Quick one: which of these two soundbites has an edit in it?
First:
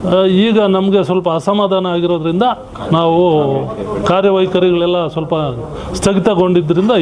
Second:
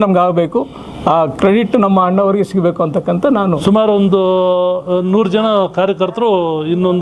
second; 1 cut; at 3.6 s

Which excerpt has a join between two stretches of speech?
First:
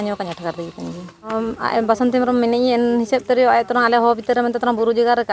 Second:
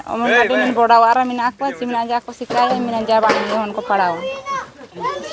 first; 1 cut; at 1.3 s

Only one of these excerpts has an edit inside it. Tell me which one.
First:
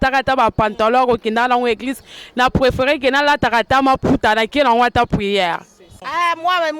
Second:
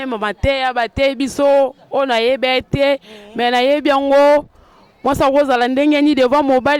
first; 1 cut; at 5.9 s

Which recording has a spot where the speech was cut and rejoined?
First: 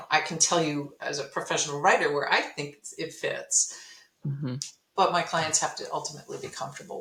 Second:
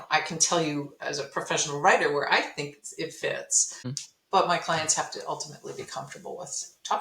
second; 1 cut; at 3.9 s

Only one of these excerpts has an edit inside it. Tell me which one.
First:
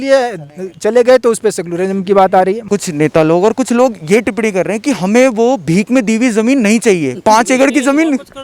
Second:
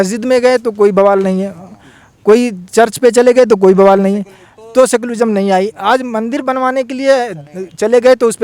first; 1 cut; at 2.6 s

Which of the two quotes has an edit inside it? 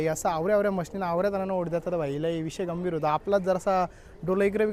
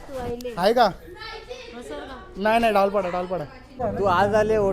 second; 1 cut; at 3.6 s

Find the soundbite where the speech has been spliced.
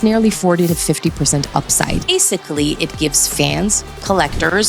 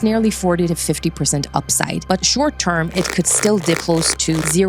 first; 1 cut; at 2.1 s

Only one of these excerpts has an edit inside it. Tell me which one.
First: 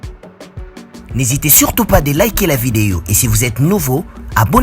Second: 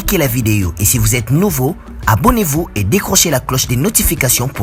first; 1 cut; at 1.1 s

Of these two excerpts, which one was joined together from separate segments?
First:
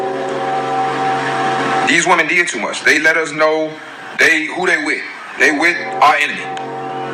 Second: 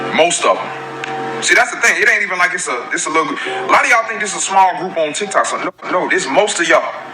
second; 1 cut; at 5.7 s

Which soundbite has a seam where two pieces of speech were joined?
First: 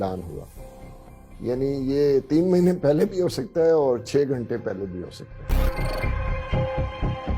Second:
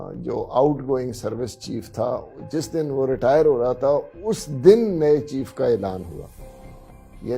first; 1 cut; at 5.6 s

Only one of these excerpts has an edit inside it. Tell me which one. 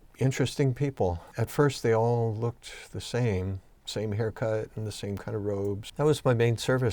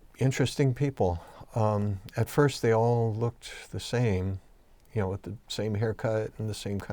first; 3 cuts; at 1.3 s, 3.7 s, 5.8 s

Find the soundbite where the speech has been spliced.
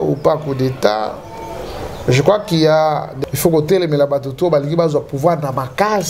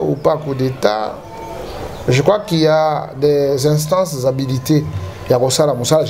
first; 1 cut; at 3.1 s

